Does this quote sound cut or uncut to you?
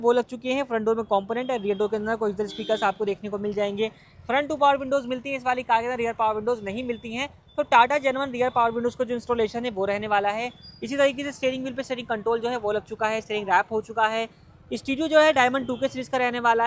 uncut